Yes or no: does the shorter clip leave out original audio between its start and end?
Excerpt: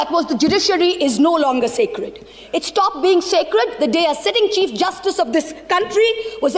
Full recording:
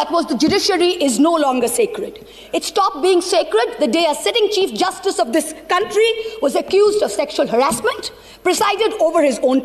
no